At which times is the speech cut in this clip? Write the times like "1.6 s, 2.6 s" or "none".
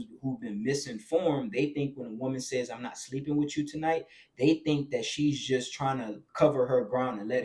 none

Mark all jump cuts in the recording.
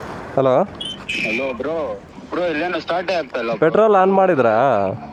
none

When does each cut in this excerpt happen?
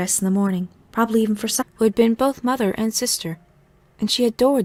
none

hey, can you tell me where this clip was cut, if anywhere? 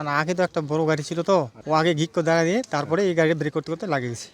1.6 s

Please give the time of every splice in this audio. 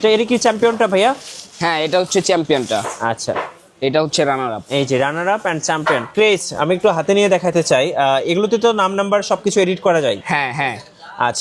6.1 s

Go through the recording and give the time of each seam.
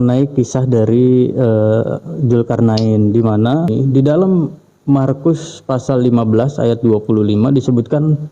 3.7 s

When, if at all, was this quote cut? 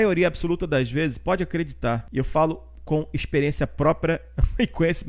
2.1 s

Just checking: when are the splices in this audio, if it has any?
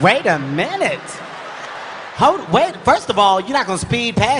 none

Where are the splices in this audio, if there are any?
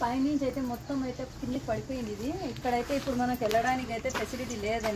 none

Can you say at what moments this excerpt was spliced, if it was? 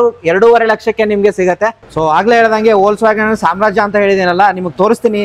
1.8 s

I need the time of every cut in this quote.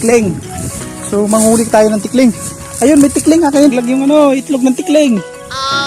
3.7 s

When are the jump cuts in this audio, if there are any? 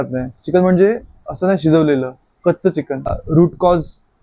3.2 s

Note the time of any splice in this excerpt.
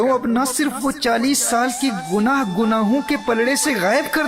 1.0 s

